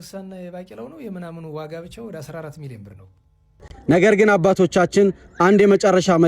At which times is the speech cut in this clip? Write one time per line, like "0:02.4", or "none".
0:03.7